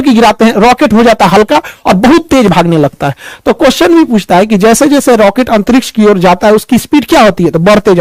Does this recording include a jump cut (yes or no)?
no